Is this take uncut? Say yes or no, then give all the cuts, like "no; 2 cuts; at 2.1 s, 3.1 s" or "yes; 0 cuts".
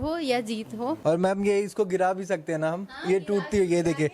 no; 1 cut; at 1.0 s